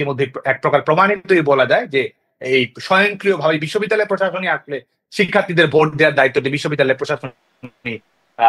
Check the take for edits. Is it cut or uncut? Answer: uncut